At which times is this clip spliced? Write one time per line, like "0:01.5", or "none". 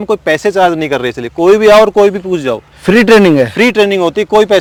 none

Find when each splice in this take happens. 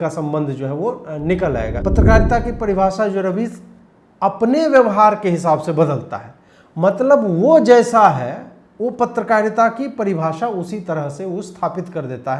0:01.8

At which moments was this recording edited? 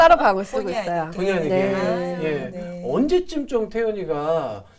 none

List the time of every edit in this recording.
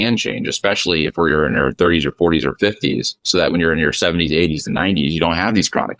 none

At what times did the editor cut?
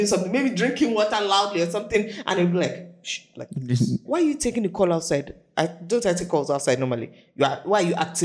0:04.0
0:05.4

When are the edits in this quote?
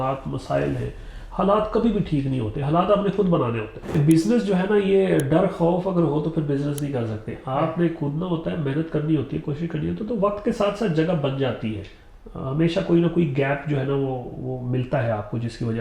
0:04.0

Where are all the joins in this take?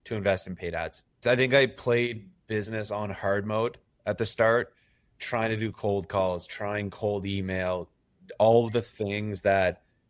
0:01.0

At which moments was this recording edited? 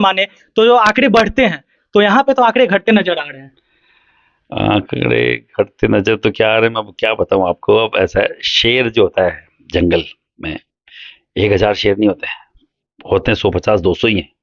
none

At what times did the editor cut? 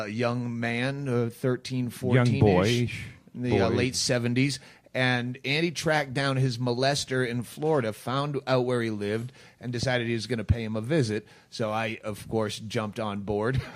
0:10.1

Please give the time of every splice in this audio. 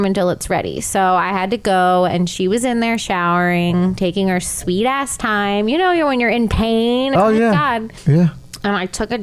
0:07.1
0:07.9

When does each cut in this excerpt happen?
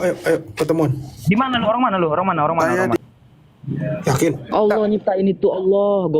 0:03.0

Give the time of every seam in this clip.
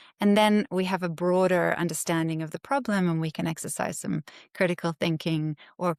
none

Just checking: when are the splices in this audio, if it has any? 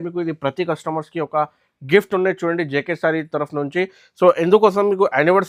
none

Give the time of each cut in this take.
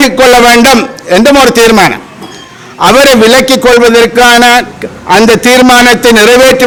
none

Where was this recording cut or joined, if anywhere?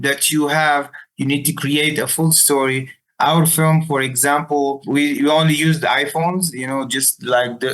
0:03.0
0:04.8

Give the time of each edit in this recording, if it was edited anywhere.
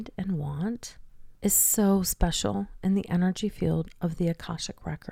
none

